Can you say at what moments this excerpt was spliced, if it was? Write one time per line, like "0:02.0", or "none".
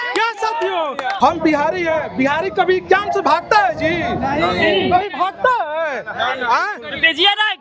0:01.1

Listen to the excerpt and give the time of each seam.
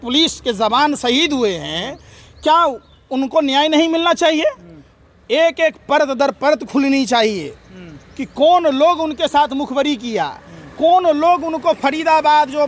none

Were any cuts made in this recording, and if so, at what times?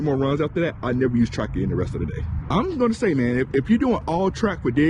0:02.3

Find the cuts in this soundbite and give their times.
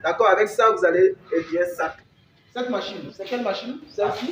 0:02.0

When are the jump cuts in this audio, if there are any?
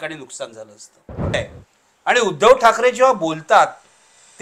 0:01.3

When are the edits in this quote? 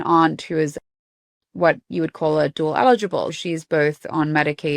0:03.4

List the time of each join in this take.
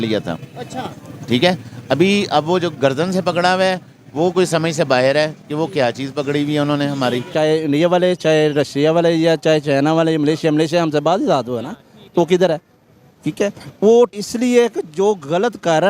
0:07.3
0:14.1

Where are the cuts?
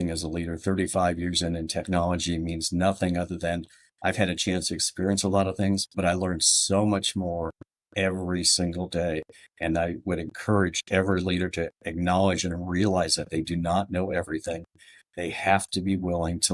none

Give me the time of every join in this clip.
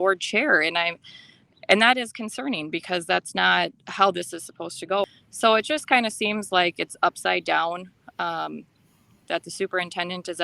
0:05.0

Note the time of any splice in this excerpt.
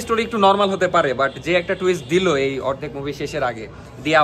none

